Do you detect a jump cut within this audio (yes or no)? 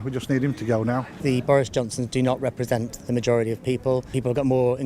yes